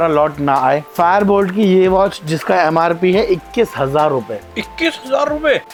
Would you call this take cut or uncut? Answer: uncut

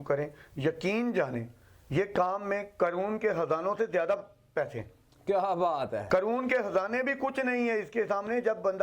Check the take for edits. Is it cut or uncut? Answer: uncut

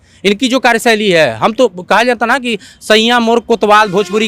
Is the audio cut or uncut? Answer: uncut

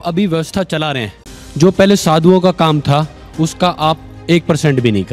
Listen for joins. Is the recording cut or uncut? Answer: cut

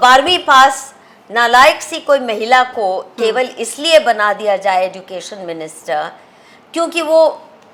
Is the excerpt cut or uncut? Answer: uncut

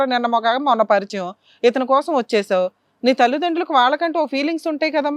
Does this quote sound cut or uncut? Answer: uncut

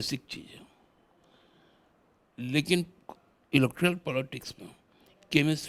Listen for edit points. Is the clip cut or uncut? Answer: uncut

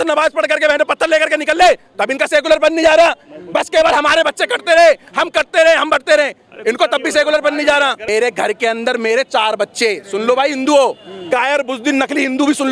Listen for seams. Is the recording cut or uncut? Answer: cut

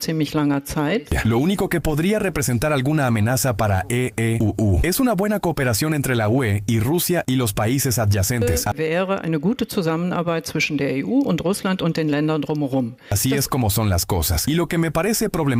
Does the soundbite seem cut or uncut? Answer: uncut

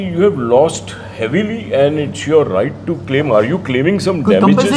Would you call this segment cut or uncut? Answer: uncut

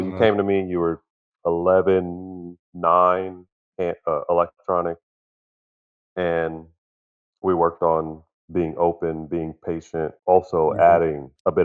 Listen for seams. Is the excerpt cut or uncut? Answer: uncut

